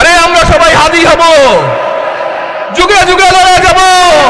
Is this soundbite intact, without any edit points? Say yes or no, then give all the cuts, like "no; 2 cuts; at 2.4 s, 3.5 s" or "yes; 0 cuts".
yes; 0 cuts